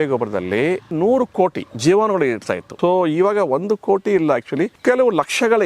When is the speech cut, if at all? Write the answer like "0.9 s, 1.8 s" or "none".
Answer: 1.7 s, 2.6 s, 4.8 s